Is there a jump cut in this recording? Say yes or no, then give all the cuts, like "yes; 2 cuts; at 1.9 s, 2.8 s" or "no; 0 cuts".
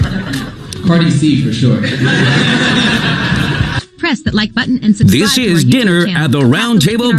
yes; 1 cut; at 5.0 s